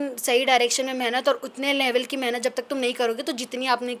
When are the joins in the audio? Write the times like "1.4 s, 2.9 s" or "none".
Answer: none